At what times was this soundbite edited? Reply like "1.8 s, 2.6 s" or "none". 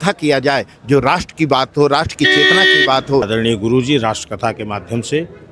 3.3 s